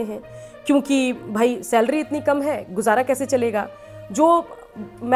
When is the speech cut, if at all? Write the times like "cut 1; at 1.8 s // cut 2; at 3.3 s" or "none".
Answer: none